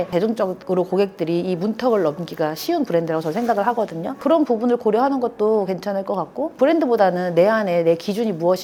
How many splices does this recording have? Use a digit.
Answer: 0